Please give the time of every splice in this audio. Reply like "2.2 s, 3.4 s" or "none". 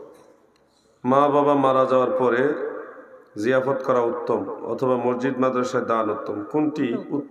none